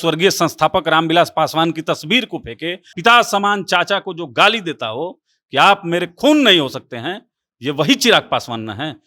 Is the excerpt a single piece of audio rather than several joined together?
no; 1 cut; at 2.9 s

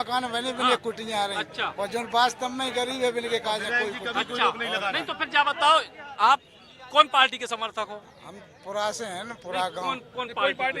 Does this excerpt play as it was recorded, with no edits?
yes; 0 cuts

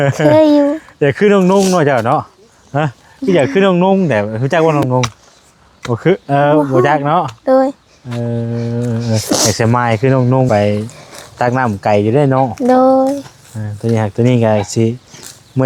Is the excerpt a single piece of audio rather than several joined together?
no; 1 cut; at 10.5 s

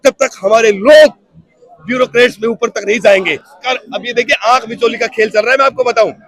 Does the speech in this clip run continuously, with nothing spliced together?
no; 1 cut; at 3.6 s

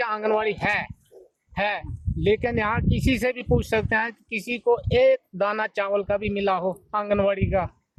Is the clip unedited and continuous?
yes; 0 cuts

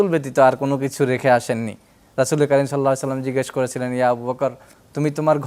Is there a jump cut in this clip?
no; 0 cuts

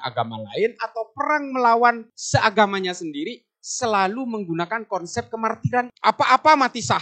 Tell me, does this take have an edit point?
yes; 2 cuts; at 2.1 s, 5.9 s

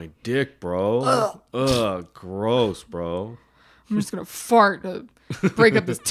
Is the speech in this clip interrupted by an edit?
no; 0 cuts

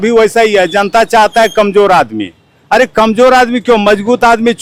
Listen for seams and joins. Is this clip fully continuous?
yes; 0 cuts

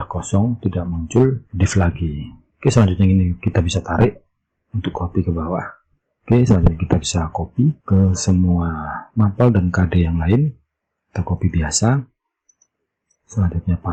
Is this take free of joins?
yes; 0 cuts

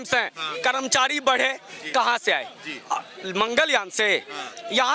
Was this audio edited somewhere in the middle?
no; 0 cuts

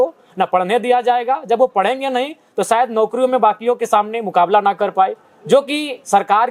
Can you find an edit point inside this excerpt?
no; 0 cuts

